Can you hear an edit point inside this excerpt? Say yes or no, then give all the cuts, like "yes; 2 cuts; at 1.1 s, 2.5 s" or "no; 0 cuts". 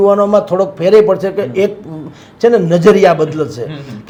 no; 0 cuts